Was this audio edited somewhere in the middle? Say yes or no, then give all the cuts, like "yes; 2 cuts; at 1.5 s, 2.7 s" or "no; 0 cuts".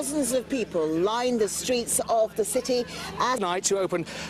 no; 0 cuts